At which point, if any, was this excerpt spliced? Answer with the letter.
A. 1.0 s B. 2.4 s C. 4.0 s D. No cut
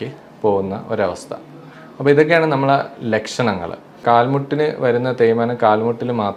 C